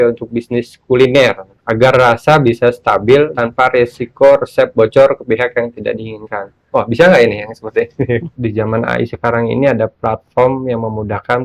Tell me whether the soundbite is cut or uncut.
cut